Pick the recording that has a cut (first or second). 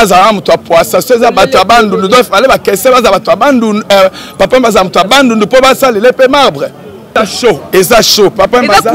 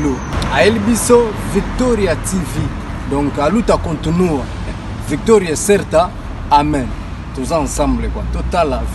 first